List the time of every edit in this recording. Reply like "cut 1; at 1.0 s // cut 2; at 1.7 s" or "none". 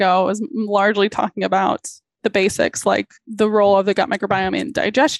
cut 1; at 2.2 s // cut 2; at 3.2 s